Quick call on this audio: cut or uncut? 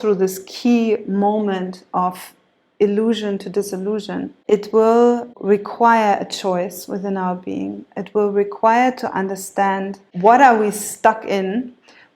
cut